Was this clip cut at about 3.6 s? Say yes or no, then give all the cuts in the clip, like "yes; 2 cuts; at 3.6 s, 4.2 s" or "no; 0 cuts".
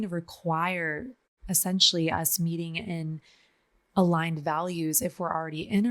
no; 1 cut; at 1.3 s